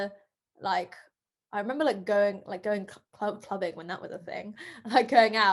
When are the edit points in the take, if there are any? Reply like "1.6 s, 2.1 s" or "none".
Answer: none